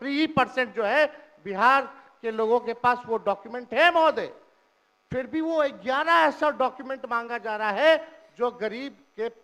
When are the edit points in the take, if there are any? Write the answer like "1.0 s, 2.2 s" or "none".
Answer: none